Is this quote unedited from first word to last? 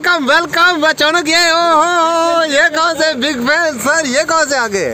yes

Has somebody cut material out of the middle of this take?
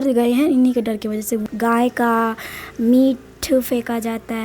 yes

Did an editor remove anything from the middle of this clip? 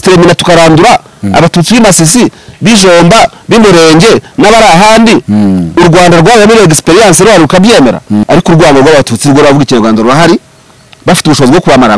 yes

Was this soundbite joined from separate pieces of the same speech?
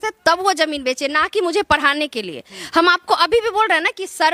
no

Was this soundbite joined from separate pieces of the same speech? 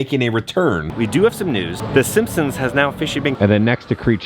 yes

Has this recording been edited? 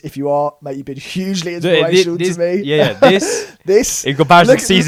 no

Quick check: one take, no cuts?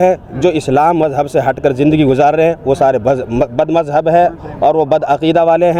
yes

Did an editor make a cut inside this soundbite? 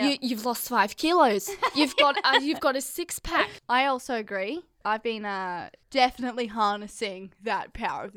yes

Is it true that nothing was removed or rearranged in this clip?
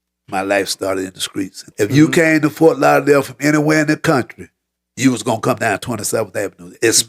no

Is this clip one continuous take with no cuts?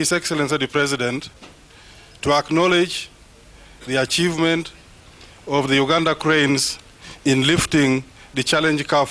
yes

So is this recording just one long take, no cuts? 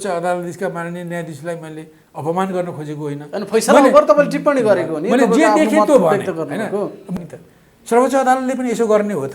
no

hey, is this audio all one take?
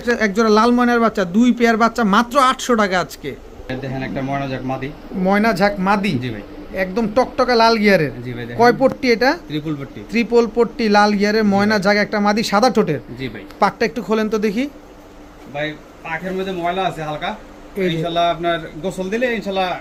yes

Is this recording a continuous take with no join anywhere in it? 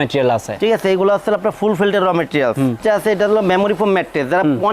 no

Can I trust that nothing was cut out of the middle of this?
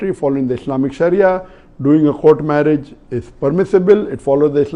yes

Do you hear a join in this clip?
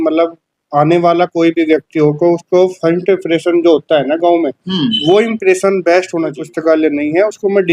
yes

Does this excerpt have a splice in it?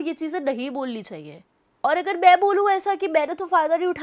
no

